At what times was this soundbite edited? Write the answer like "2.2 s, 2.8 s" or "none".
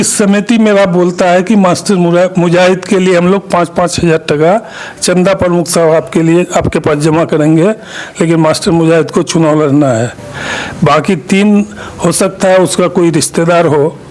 none